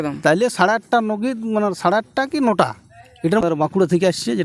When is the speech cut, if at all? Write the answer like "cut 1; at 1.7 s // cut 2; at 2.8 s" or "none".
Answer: cut 1; at 3.4 s